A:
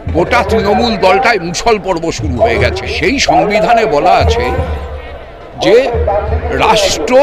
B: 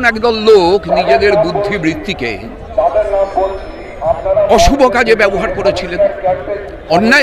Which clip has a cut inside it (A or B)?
A